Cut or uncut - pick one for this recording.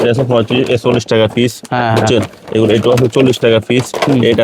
uncut